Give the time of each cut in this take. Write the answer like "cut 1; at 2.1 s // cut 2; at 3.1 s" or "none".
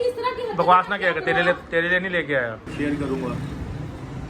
cut 1; at 2.6 s